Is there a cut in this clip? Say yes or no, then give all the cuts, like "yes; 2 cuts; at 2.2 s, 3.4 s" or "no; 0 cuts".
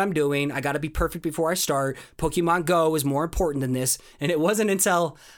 no; 0 cuts